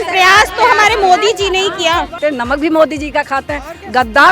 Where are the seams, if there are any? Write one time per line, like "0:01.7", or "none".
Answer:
0:02.2